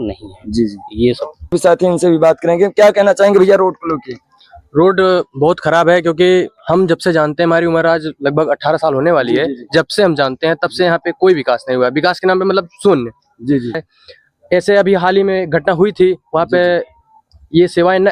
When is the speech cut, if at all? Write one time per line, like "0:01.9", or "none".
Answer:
0:01.5
0:13.8